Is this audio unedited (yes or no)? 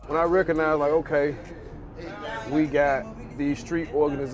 yes